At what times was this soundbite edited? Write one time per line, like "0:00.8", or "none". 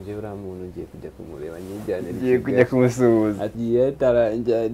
0:03.5